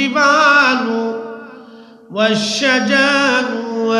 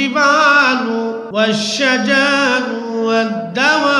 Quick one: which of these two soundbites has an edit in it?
second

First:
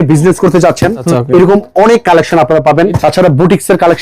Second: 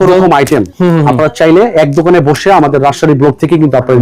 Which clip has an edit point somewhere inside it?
first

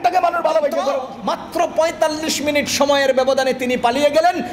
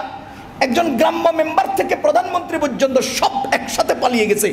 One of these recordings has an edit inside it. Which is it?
first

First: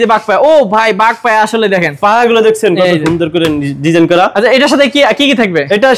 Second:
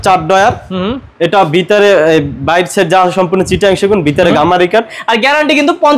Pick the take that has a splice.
second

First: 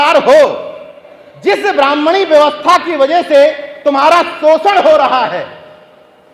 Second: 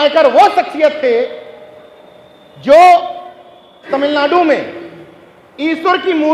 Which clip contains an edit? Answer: second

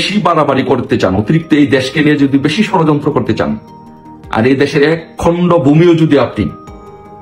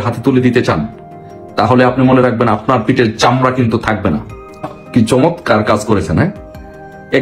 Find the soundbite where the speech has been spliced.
second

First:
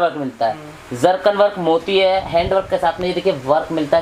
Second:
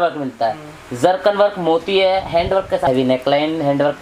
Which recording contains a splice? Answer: second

